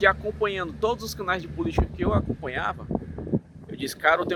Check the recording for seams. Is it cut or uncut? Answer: uncut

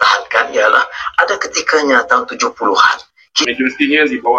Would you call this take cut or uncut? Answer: cut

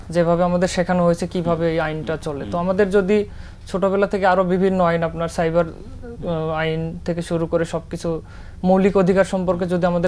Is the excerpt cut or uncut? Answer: uncut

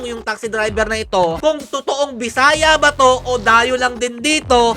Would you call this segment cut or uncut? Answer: cut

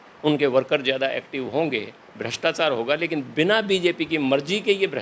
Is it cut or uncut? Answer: uncut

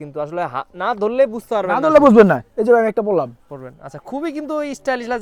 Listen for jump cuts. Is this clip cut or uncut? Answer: uncut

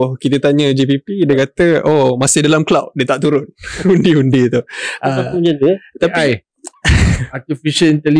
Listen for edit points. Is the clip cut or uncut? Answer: uncut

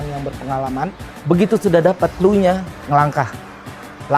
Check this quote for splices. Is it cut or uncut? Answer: cut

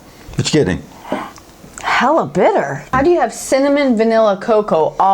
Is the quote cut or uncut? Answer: cut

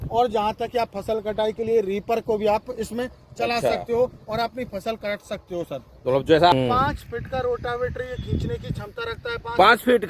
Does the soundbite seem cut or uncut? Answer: cut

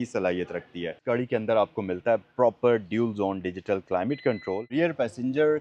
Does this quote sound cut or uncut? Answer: cut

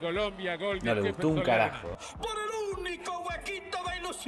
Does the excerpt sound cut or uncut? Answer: cut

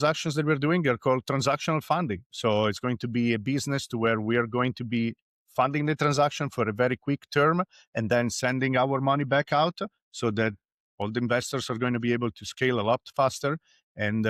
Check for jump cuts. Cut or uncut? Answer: uncut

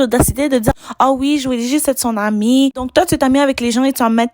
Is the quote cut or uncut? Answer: cut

